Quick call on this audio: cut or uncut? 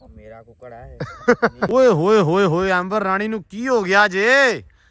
cut